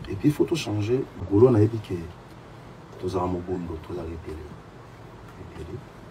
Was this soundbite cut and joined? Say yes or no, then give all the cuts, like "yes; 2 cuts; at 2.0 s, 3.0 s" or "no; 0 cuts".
yes; 1 cut; at 1.2 s